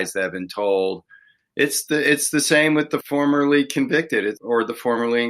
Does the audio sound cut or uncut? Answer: cut